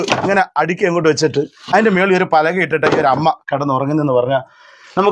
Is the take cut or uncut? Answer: uncut